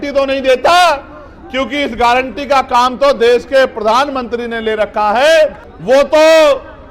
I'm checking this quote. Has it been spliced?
yes; 1 cut; at 5.7 s

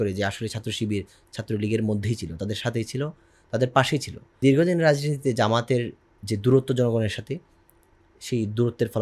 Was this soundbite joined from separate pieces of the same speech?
yes; 1 cut; at 4.4 s

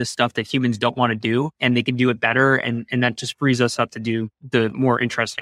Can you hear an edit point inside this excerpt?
yes; 2 cuts; at 1.6 s, 4.4 s

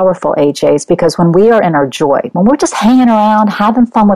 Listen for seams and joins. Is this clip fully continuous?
yes; 0 cuts

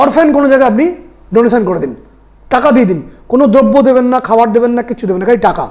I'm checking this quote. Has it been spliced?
no; 0 cuts

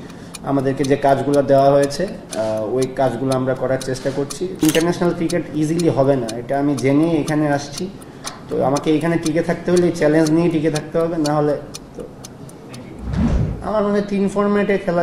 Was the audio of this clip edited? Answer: yes; 2 cuts; at 4.6 s, 13.3 s

